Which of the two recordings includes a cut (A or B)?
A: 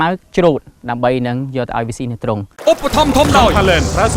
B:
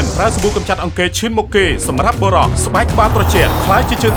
A